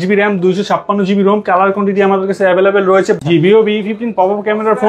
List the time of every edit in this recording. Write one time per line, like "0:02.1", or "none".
0:03.2